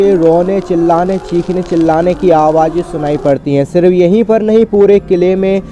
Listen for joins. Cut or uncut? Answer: uncut